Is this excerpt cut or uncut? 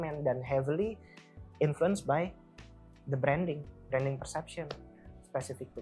uncut